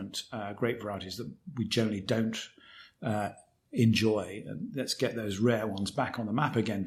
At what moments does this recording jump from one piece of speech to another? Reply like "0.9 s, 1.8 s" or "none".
none